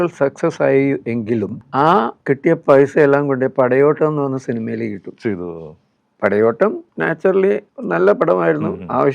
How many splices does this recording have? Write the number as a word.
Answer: four